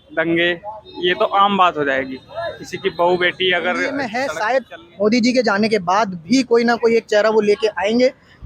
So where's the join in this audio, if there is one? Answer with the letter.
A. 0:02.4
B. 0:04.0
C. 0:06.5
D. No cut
B